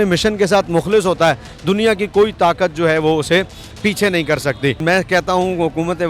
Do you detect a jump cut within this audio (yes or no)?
yes